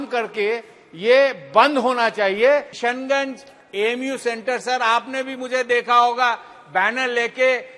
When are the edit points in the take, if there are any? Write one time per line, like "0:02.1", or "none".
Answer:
0:02.7

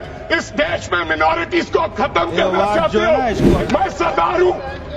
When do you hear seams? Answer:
0:03.5

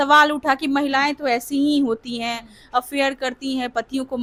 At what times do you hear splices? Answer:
none

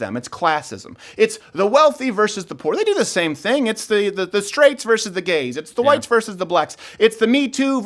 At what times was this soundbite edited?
none

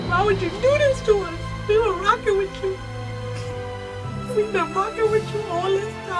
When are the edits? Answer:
none

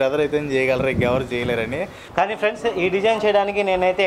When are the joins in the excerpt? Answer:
0:02.0

